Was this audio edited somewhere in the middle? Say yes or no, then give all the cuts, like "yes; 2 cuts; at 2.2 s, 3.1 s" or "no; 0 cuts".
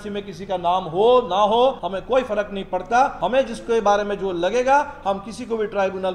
yes; 2 cuts; at 1.9 s, 3.1 s